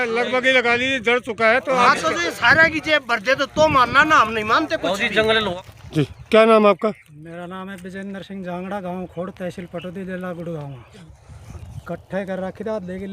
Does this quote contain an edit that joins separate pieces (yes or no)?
yes